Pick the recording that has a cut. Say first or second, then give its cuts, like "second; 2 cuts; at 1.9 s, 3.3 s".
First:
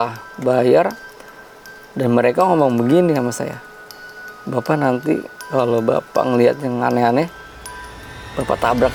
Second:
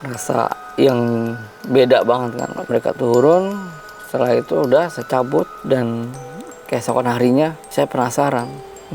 second; 3 cuts; at 2.6 s, 5.6 s, 7.6 s